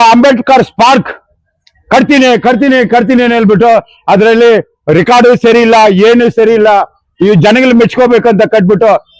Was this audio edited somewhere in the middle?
no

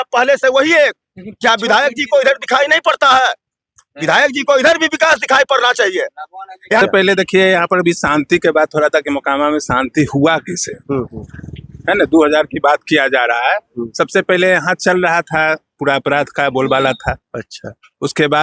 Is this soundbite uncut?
no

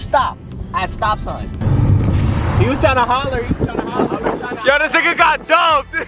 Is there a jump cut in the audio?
yes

